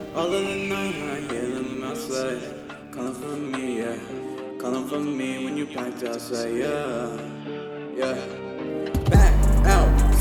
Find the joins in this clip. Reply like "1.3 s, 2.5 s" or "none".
none